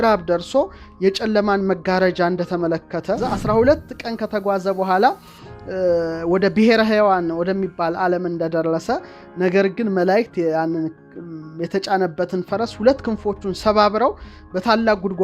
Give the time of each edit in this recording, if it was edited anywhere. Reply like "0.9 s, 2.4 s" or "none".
3.2 s

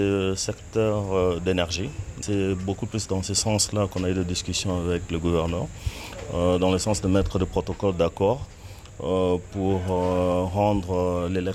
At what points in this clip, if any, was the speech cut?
2.2 s

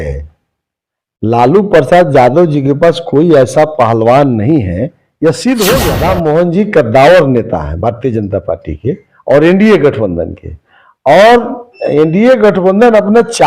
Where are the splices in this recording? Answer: 6.0 s

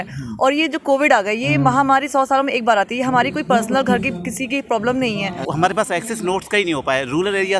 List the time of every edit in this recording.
5.4 s

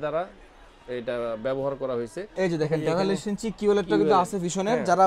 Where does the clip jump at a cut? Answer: 2.3 s

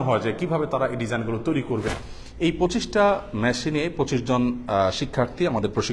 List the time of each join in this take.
1.9 s

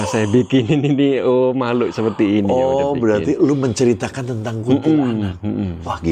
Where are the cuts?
none

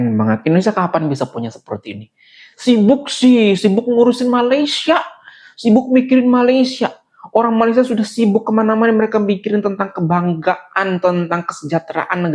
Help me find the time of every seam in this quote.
none

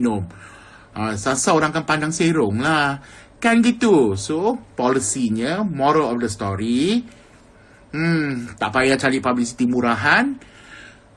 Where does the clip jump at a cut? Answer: 5.7 s

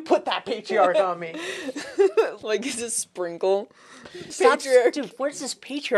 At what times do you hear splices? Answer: 2.4 s, 4.3 s

